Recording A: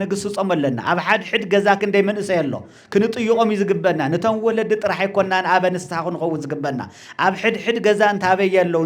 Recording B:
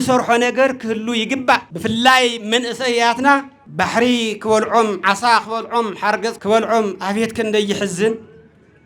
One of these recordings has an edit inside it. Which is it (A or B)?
B